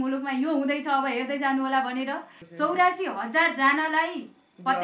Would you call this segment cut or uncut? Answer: cut